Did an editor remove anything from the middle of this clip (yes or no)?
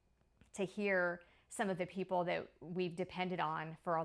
no